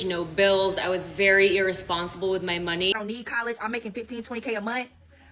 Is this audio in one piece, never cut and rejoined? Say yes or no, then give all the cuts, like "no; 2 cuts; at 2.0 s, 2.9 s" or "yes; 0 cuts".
no; 1 cut; at 2.9 s